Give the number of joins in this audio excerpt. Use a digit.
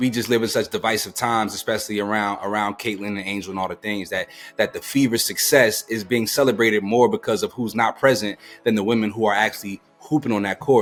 0